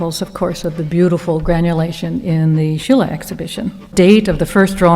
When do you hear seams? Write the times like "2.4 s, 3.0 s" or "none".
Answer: 3.9 s